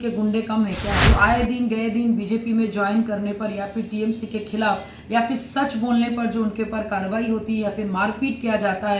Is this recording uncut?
no; 1 cut; at 1.0 s

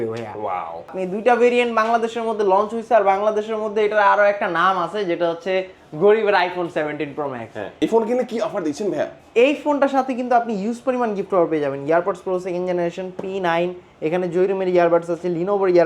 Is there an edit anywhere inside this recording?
yes; 2 cuts; at 0.9 s, 7.8 s

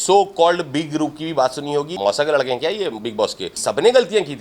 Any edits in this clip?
yes; 2 cuts; at 1.9 s, 3.5 s

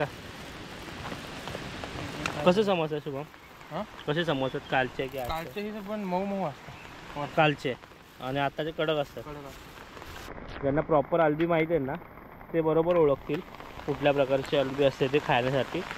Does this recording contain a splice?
yes; 1 cut; at 10.4 s

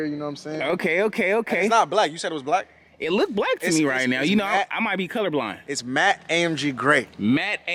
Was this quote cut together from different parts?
no; 0 cuts

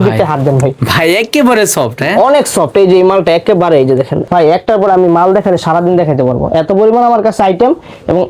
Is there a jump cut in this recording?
yes; 1 cut; at 4.2 s

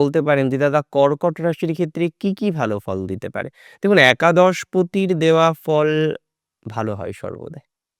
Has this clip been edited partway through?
no; 0 cuts

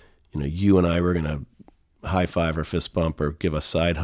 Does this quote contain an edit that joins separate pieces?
no; 0 cuts

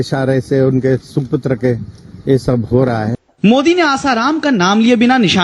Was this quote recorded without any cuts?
no; 1 cut; at 3.1 s

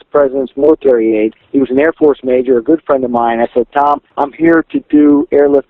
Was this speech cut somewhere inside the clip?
yes; 2 cuts; at 1.4 s, 4.1 s

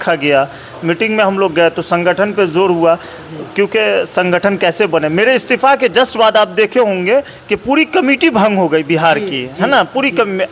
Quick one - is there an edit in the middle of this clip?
no; 0 cuts

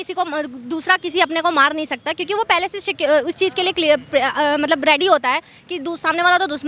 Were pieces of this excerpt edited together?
no; 0 cuts

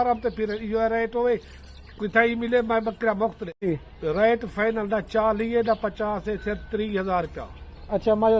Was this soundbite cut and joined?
yes; 1 cut; at 3.7 s

